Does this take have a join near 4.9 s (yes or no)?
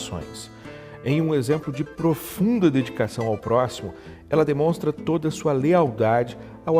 no